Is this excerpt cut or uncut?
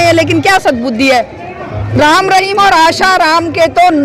cut